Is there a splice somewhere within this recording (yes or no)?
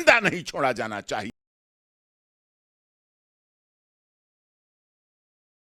no